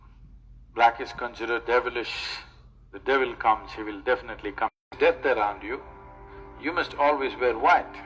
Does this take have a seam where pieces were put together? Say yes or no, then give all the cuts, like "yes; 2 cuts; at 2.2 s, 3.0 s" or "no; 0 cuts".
yes; 1 cut; at 4.9 s